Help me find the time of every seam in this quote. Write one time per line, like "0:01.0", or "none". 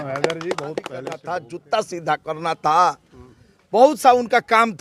0:01.2